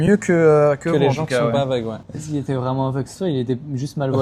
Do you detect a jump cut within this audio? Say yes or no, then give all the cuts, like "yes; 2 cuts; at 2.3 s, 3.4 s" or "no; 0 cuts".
yes; 1 cut; at 2.0 s